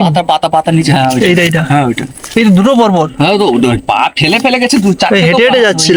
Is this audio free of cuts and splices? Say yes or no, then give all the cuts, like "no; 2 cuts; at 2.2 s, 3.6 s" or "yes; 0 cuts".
yes; 0 cuts